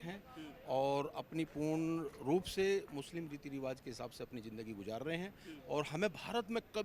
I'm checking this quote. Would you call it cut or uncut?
uncut